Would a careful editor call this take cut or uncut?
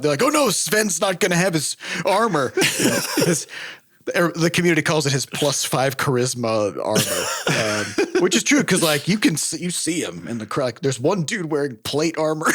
uncut